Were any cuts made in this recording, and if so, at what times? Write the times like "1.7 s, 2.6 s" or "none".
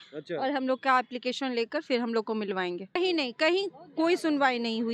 3.0 s